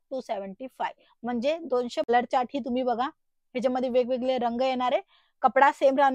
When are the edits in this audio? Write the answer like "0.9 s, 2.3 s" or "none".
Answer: 2.1 s